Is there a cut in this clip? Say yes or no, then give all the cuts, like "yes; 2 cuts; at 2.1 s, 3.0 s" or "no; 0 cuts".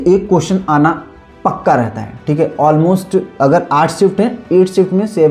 no; 0 cuts